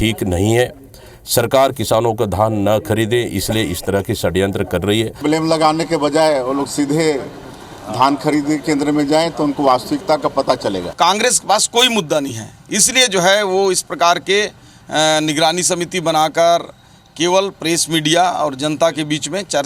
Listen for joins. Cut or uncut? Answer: cut